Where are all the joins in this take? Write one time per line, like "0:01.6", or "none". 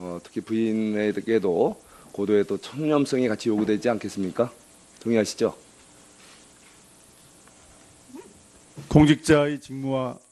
0:03.3